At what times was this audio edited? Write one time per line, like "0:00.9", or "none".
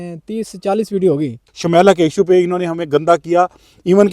0:01.4